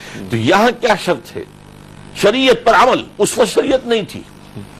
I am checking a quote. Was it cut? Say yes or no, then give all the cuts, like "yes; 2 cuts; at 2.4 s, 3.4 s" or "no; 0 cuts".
no; 0 cuts